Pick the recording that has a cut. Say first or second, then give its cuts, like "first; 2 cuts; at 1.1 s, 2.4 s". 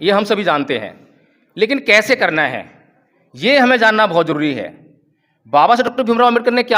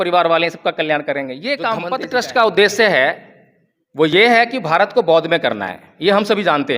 second; 1 cut; at 1.9 s